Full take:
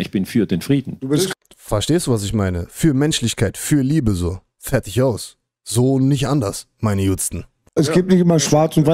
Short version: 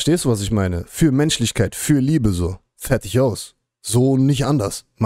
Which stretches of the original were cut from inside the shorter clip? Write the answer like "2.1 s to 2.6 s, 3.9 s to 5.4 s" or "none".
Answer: none

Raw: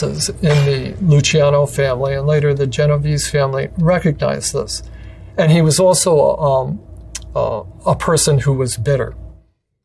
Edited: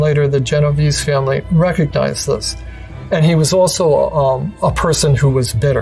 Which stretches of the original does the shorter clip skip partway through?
6.8 s to 7.7 s

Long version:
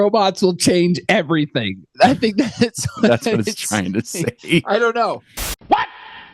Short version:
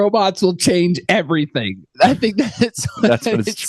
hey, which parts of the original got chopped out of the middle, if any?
none

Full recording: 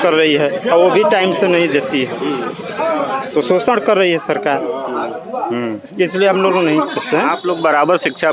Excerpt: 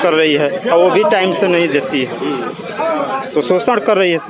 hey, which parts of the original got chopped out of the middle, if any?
none

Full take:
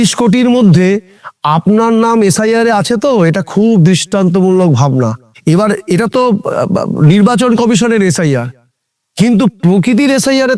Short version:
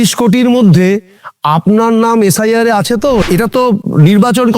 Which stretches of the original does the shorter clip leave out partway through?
3.6 s to 6.6 s

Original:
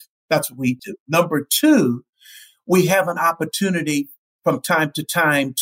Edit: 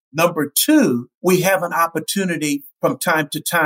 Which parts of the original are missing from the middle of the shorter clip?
2.0 s to 2.6 s, 4.1 s to 4.3 s

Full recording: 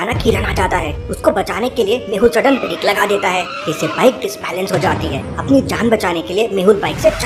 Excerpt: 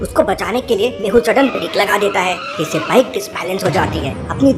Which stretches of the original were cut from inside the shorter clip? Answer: none

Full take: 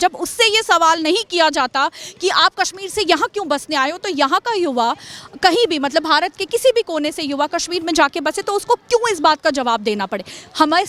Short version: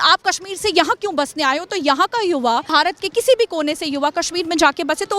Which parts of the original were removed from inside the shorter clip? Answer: 5.0 s to 6.1 s

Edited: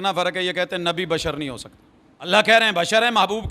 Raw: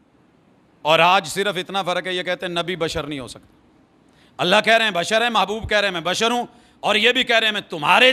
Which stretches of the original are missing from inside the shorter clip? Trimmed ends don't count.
4.0 s to 4.5 s

